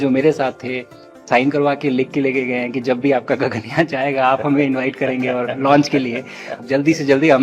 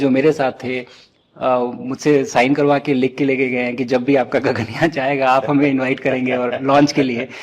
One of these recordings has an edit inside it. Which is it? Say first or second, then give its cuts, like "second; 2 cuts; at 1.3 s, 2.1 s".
first; 2 cuts; at 1.2 s, 6.6 s